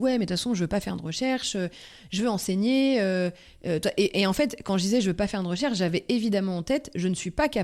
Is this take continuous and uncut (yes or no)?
yes